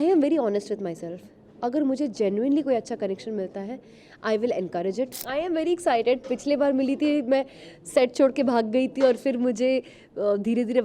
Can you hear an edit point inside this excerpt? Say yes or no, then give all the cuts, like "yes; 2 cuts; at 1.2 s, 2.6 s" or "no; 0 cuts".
yes; 1 cut; at 5.2 s